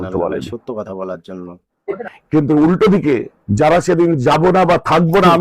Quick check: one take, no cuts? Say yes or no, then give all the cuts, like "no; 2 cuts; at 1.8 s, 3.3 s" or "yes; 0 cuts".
no; 1 cut; at 2.0 s